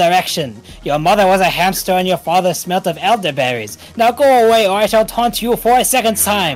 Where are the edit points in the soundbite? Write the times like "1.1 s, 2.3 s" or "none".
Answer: none